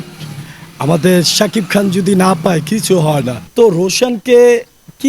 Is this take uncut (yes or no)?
no